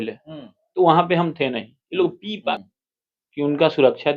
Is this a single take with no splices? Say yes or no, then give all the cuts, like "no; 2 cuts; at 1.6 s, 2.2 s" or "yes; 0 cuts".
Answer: no; 1 cut; at 2.5 s